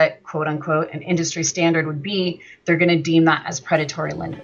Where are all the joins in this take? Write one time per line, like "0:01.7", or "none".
none